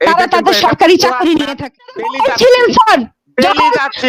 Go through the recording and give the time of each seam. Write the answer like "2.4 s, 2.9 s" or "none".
2.0 s